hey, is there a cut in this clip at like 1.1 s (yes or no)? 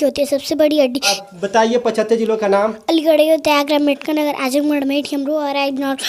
yes